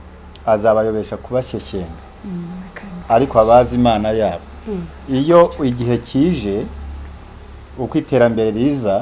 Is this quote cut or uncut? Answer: uncut